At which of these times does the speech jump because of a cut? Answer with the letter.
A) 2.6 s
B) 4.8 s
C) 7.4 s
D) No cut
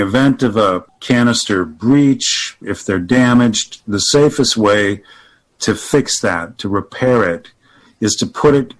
D